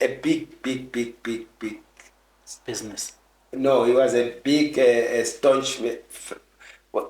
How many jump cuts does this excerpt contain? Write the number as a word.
zero